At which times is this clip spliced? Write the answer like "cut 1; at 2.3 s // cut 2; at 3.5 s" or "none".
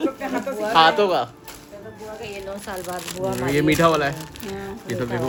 none